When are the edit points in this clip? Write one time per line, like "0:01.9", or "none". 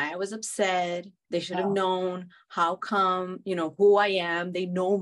0:01.1